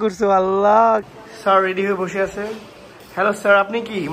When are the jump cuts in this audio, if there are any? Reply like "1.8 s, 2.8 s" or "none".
1.1 s